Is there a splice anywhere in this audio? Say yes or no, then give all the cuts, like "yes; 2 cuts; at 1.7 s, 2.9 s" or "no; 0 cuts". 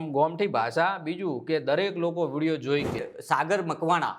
yes; 1 cut; at 3.1 s